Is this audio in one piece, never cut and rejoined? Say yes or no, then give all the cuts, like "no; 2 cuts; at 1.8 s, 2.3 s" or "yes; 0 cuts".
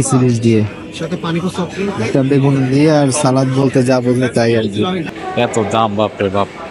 no; 1 cut; at 5.1 s